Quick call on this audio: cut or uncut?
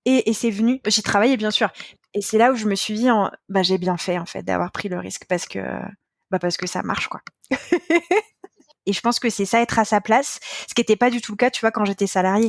cut